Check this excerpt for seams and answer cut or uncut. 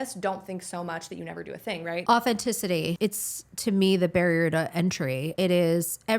cut